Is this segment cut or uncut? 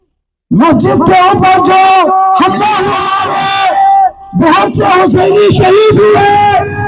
cut